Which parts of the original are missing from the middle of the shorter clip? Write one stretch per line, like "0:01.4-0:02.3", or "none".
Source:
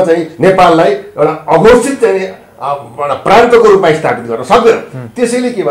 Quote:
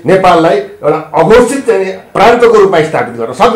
0:02.4-0:03.2